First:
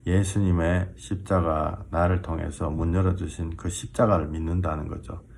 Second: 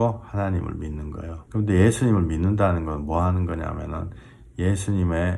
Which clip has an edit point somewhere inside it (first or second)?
second